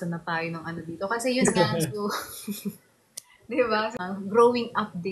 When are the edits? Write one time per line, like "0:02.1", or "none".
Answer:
0:03.9